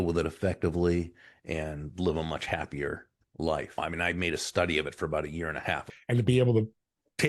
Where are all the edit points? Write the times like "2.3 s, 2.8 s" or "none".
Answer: 3.8 s, 5.9 s